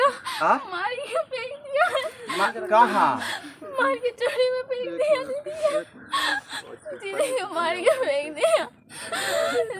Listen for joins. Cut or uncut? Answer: uncut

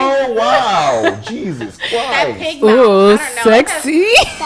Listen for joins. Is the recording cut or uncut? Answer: uncut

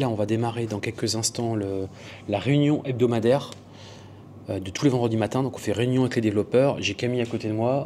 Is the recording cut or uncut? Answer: uncut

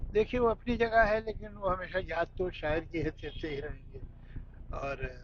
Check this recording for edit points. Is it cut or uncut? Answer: uncut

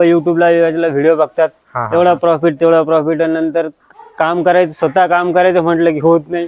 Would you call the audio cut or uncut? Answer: uncut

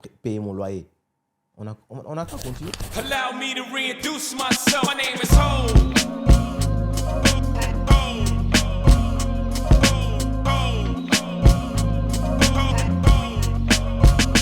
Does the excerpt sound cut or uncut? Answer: cut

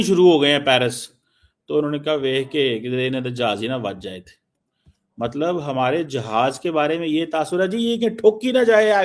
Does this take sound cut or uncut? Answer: uncut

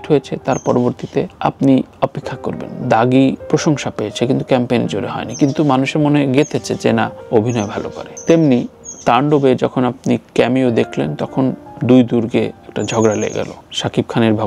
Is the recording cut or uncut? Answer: uncut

